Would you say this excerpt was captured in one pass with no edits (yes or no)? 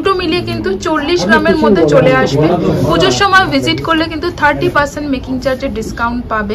yes